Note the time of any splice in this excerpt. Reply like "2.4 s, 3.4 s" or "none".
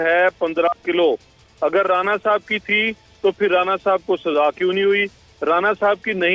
none